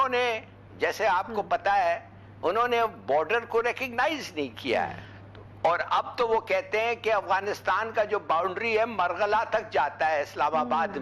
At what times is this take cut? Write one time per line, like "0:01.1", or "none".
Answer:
0:05.0